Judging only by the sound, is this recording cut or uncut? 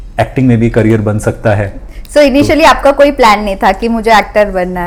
uncut